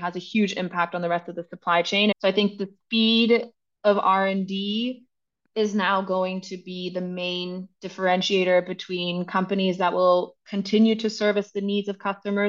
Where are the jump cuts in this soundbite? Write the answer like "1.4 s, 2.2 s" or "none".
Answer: 2.1 s